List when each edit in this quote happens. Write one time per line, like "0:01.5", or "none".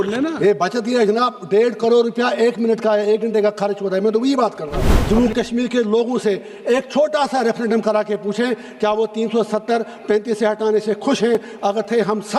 0:04.9